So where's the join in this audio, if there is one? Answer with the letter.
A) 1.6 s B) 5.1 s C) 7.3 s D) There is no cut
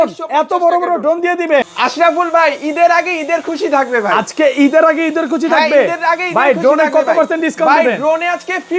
A